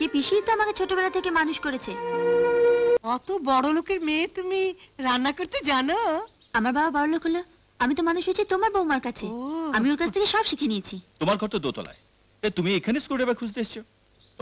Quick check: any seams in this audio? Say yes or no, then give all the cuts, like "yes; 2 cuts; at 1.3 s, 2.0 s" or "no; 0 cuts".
yes; 2 cuts; at 3.0 s, 11.0 s